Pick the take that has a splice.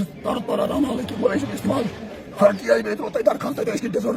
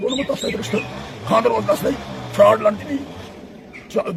first; 1 cut; at 2.5 s

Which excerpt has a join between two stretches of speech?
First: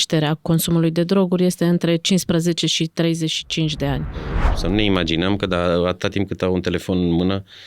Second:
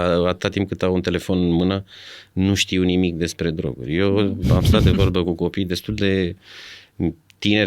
first; 1 cut; at 4.4 s

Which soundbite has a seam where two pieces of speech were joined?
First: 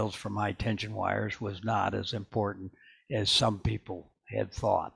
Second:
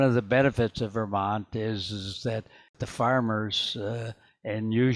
second; 1 cut; at 2.8 s

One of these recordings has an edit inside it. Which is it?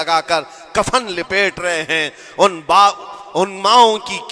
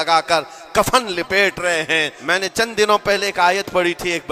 second; 1 cut; at 2.2 s

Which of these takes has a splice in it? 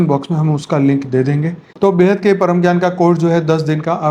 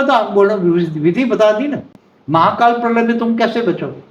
first; 1 cut; at 1.6 s

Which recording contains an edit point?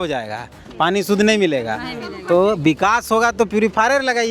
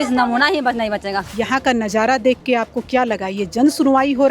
second; 1 cut; at 1.2 s

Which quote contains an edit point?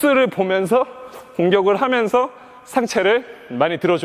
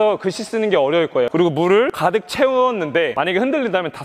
second; 3 cuts; at 1.3 s, 1.9 s, 3.1 s

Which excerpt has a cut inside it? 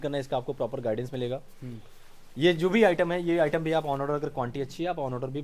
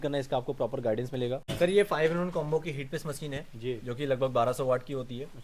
second; 1 cut; at 1.5 s

